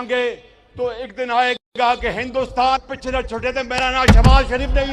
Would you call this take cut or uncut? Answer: uncut